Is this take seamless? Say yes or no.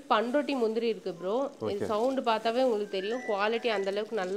yes